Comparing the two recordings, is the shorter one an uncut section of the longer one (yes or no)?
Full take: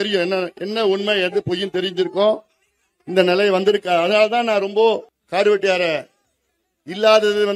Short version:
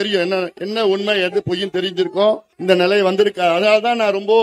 no